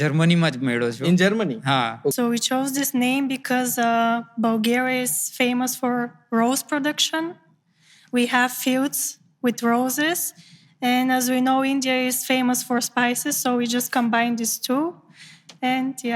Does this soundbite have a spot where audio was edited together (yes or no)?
yes